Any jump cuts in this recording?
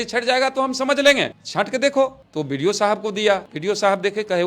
yes; 1 cut; at 3.5 s

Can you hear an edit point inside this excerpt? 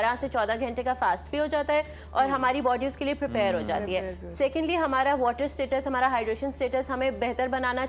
no; 0 cuts

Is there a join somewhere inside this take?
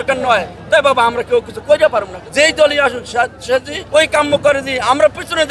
yes; 2 cuts; at 2.2 s, 3.8 s

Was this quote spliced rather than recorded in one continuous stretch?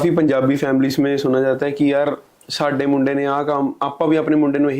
no; 0 cuts

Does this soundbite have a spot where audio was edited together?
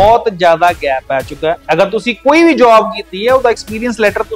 no; 0 cuts

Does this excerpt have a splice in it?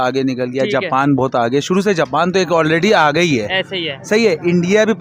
no; 0 cuts

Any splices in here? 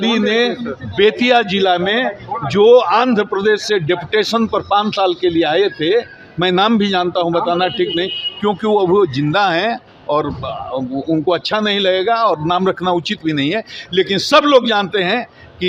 no; 0 cuts

